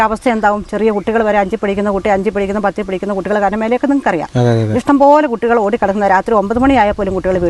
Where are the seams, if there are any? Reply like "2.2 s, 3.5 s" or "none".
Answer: none